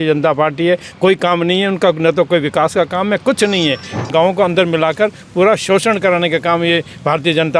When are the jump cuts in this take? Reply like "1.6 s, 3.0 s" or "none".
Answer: 4.1 s

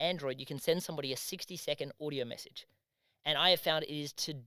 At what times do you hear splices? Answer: none

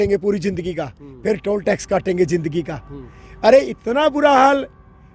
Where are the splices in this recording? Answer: none

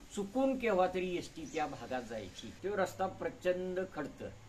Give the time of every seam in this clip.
2.5 s

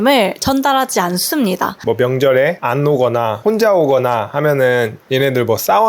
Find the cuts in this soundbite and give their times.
1.8 s, 2.6 s, 3.4 s

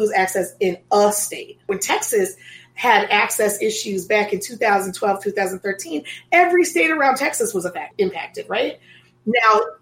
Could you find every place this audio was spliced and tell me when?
1.6 s, 7.9 s

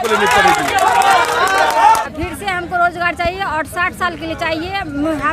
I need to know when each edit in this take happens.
2.1 s

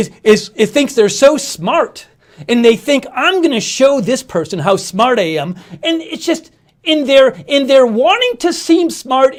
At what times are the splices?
none

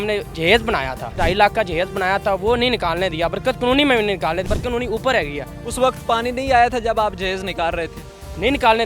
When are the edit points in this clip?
1.0 s, 4.4 s

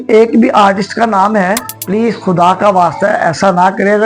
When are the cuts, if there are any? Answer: 1.7 s

